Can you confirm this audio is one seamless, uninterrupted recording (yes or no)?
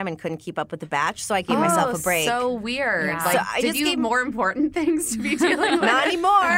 yes